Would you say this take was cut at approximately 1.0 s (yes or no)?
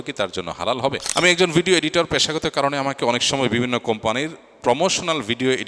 yes